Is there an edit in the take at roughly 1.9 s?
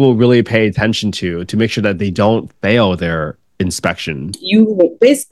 no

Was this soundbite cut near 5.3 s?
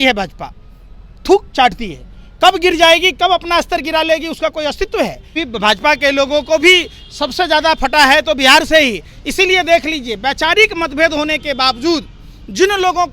yes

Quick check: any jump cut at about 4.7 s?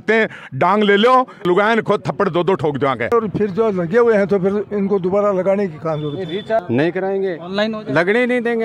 no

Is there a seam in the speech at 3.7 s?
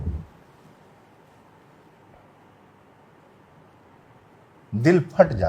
yes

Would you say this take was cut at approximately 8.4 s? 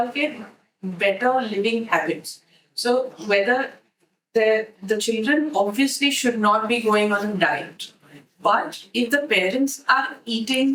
no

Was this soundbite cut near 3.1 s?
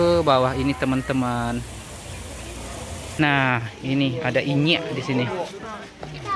yes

